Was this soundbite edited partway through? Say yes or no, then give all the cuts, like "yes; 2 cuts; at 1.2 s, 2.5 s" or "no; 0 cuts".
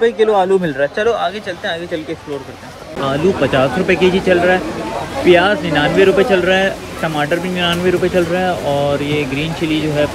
no; 0 cuts